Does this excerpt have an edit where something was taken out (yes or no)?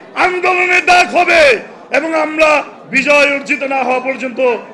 no